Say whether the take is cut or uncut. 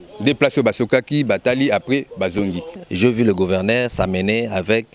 cut